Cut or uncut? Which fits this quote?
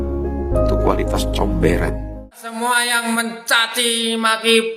cut